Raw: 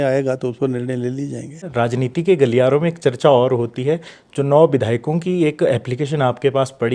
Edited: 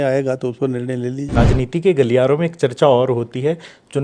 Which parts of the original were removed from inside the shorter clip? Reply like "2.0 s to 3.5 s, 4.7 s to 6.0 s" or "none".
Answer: 1.4 s to 1.8 s